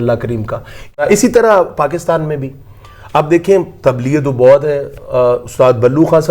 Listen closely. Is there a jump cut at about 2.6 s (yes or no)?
no